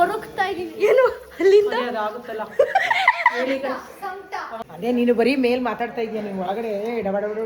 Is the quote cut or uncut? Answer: cut